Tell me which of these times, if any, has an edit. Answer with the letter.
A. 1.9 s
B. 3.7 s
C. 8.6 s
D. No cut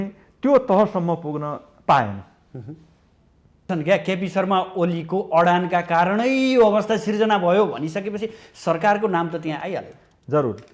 B